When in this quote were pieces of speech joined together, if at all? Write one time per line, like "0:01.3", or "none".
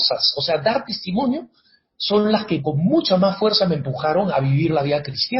0:02.6
0:04.3